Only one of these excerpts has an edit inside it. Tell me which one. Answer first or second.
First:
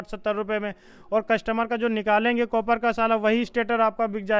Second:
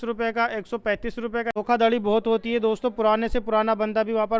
second